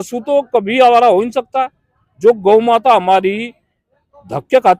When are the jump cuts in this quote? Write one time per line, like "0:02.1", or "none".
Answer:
none